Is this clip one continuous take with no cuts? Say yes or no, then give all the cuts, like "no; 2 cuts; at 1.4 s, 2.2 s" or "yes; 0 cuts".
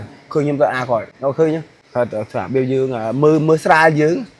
no; 2 cuts; at 1.1 s, 1.8 s